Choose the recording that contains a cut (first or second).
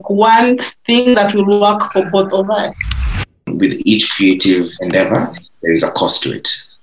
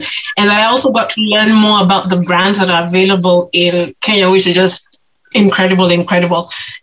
first